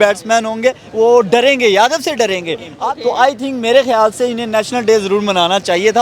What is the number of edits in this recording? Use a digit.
1